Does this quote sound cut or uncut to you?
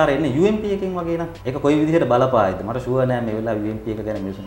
cut